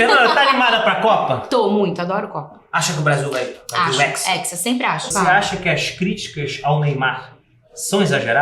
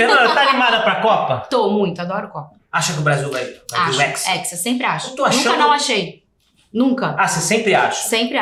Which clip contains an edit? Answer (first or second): first